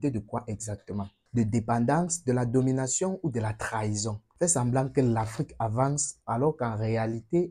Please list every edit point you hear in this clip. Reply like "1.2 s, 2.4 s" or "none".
4.2 s